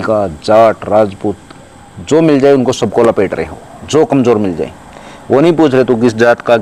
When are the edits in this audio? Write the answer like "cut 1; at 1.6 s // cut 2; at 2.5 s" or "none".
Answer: none